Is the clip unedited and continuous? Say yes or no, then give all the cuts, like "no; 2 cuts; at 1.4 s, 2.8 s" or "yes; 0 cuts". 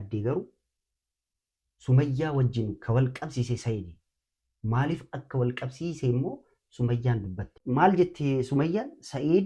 no; 1 cut; at 7.5 s